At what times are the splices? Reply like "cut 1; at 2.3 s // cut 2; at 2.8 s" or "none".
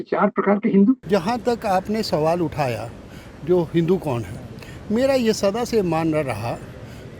cut 1; at 1.0 s